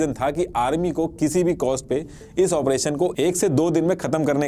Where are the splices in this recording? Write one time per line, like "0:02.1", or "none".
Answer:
none

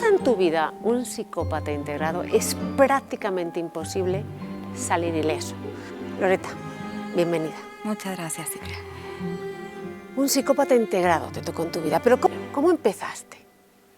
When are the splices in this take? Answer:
0:12.3

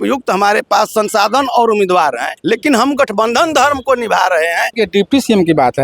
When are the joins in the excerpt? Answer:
0:02.3
0:04.7

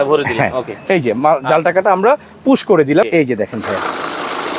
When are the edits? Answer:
0:03.1

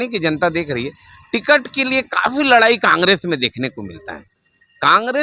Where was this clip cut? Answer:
none

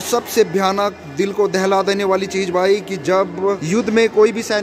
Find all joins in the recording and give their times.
0:03.6

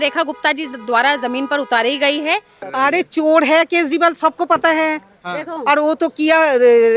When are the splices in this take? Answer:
0:02.6

